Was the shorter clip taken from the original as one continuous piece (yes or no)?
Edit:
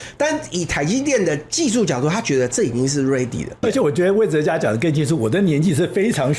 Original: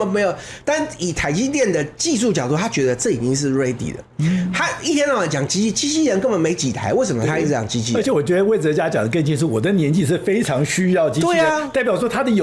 no